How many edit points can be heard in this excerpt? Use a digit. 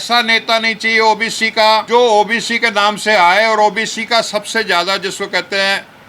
1